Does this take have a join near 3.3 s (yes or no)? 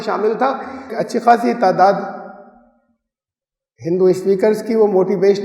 no